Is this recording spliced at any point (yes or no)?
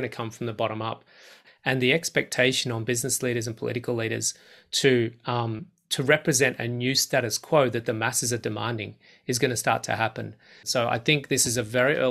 yes